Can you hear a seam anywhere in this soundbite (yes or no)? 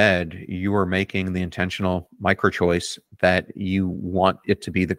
no